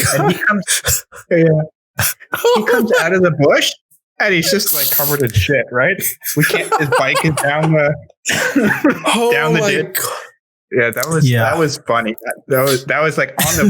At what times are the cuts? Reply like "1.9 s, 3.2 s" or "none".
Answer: none